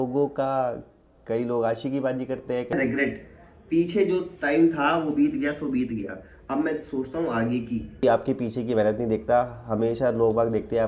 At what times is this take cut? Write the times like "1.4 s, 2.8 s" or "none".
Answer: 2.7 s, 8.0 s